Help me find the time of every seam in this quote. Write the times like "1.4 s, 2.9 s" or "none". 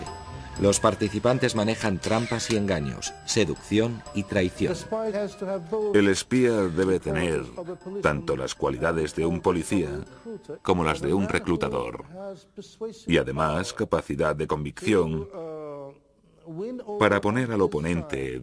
13.5 s